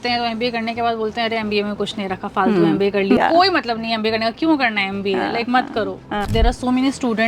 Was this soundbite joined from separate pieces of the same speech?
yes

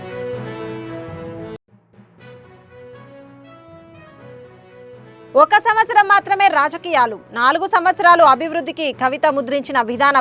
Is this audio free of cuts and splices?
no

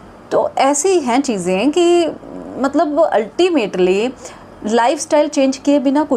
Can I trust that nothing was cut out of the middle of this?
yes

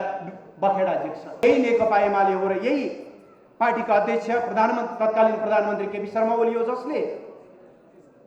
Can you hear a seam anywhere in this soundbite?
yes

